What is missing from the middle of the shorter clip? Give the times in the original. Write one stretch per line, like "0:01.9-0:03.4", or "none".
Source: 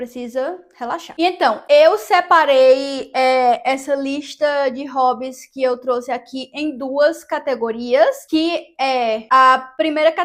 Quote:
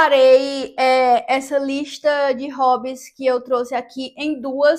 none